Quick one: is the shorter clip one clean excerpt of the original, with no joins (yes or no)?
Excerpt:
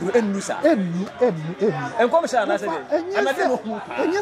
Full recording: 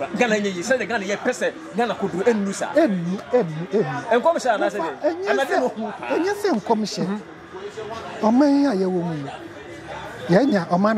yes